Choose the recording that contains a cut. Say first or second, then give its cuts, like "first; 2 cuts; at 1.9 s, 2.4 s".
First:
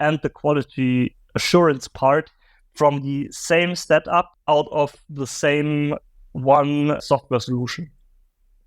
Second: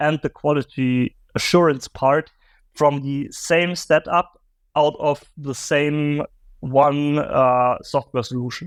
first; 2 cuts; at 4.4 s, 7.0 s